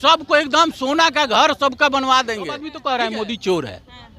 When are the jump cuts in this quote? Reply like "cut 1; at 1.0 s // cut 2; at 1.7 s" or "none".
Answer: cut 1; at 2.7 s